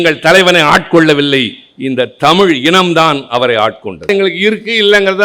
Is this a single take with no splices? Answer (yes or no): no